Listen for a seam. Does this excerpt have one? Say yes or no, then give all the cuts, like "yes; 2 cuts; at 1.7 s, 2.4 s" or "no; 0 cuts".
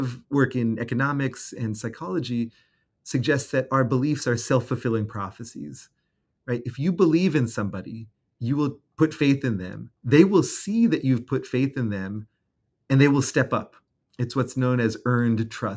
no; 0 cuts